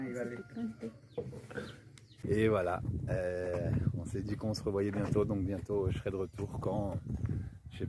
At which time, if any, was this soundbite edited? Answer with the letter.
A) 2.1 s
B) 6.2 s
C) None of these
A